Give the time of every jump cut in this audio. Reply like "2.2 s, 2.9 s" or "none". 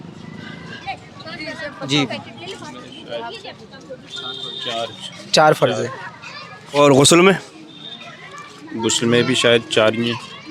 none